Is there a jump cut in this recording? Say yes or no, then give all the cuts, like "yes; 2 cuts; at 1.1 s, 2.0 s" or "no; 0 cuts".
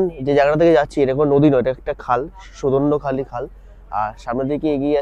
no; 0 cuts